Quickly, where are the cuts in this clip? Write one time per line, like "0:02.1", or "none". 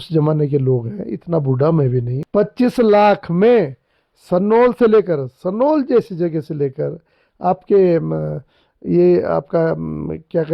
0:02.2

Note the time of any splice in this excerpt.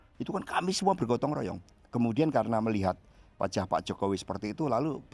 0:01.6

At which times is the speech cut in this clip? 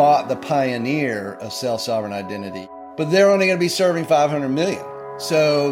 0:02.7

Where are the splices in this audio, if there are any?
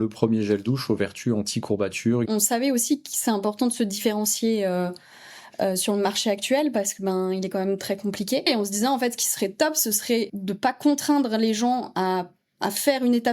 0:02.3
0:08.4
0:10.3

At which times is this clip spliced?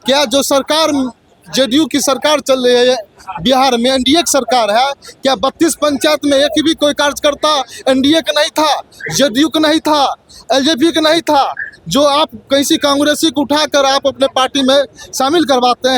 none

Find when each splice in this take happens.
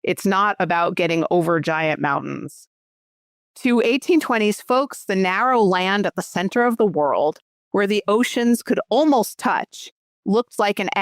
0:03.1

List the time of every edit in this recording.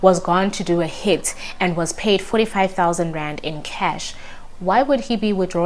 none

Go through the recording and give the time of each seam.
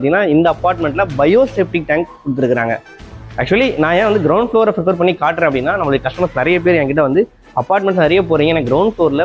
0:03.0

